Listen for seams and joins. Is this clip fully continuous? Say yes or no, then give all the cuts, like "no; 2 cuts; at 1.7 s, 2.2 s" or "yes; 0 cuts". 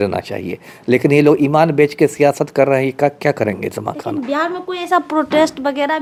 yes; 0 cuts